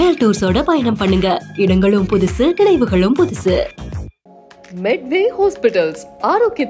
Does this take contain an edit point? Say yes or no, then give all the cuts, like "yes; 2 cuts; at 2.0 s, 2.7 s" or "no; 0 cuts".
no; 0 cuts